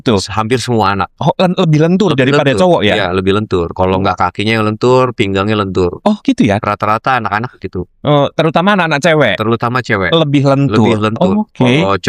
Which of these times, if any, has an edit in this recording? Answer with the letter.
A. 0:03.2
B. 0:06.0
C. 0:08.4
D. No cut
D